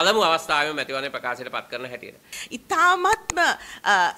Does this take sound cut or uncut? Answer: cut